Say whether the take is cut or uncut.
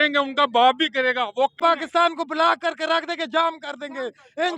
cut